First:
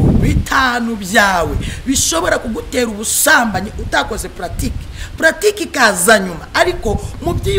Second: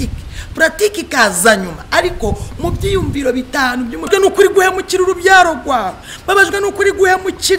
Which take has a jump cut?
second; 1 cut; at 4.1 s

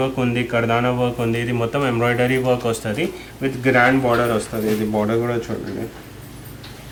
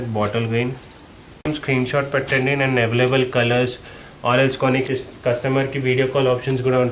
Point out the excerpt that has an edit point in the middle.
second; 1 cut; at 1.5 s

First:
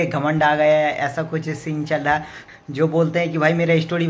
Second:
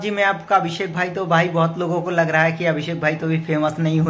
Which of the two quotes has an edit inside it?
first; 1 cut; at 2.4 s

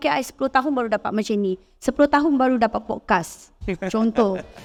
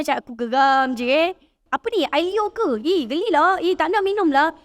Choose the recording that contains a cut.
second; 1 cut; at 1.6 s

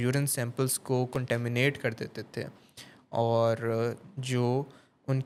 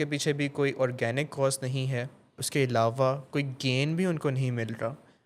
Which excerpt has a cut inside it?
second; 1 cut; at 2.4 s

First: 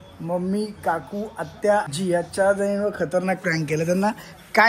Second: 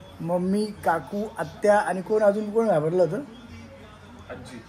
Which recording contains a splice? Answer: first; 1 cut; at 1.9 s

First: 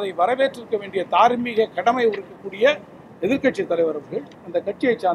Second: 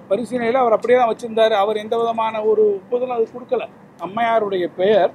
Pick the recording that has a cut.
second; 1 cut; at 4.1 s

